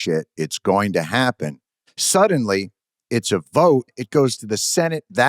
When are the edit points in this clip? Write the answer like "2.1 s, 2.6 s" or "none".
4.0 s